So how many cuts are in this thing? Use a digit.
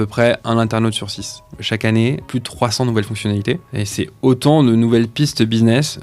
3